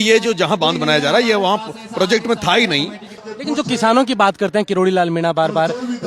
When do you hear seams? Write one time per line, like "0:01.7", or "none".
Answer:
0:03.1